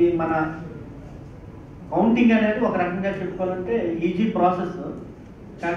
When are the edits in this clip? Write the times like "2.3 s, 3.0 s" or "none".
none